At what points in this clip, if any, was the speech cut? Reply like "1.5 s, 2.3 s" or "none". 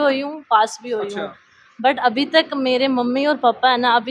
none